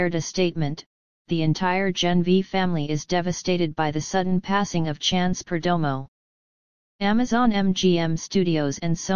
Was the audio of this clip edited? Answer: no; 0 cuts

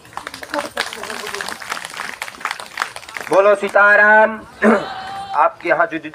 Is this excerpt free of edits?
yes; 0 cuts

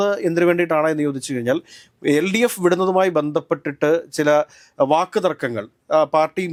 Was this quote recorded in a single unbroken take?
yes; 0 cuts

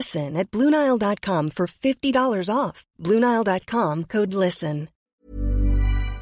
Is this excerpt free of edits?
no; 1 cut; at 5.1 s

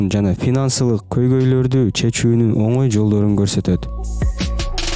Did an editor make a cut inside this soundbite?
no; 0 cuts

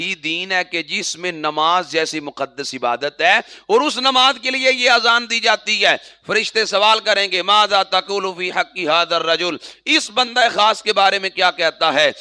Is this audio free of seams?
yes; 0 cuts

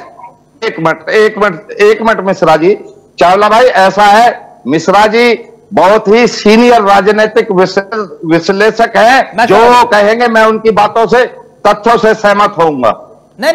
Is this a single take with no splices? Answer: yes; 0 cuts

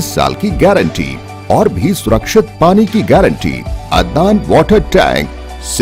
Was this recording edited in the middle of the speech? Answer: yes; 1 cut; at 3.7 s

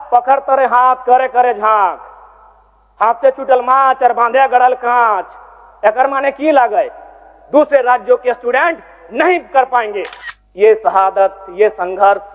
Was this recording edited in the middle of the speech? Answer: yes; 1 cut; at 10.1 s

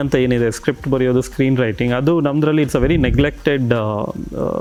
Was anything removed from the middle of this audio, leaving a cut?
no; 0 cuts

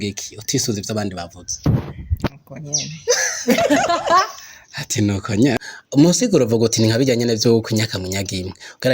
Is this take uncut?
no; 1 cut; at 5.5 s

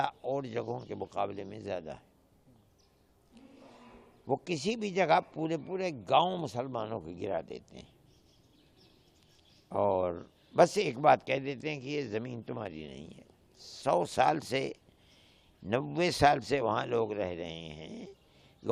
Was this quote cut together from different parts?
no; 0 cuts

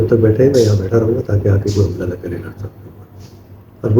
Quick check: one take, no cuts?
yes; 0 cuts

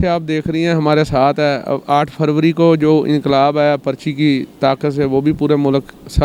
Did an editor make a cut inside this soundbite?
no; 0 cuts

